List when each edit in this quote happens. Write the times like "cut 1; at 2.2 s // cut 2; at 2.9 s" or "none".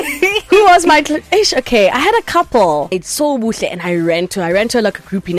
cut 1; at 3.0 s